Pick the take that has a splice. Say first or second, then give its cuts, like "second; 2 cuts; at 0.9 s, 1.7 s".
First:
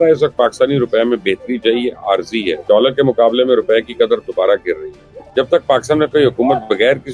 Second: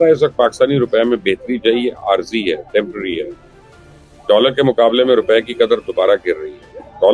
first; 2 cuts; at 2.6 s, 5.2 s